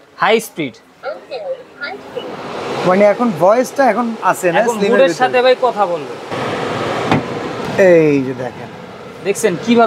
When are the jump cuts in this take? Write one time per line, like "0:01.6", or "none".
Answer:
0:06.3
0:07.7